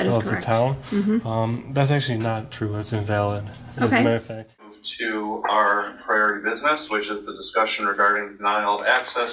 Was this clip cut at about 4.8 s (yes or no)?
yes